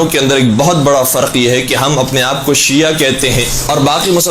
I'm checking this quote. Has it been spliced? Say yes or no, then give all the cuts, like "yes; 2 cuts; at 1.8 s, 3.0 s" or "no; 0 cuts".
yes; 1 cut; at 1.3 s